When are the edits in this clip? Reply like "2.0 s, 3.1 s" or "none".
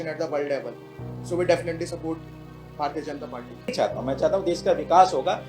3.7 s